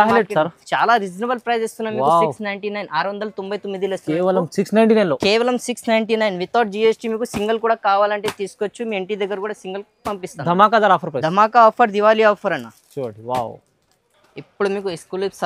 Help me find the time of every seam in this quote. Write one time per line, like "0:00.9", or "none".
none